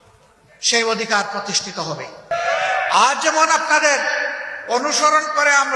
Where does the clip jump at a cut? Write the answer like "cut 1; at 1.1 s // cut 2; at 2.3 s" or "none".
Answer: cut 1; at 2.3 s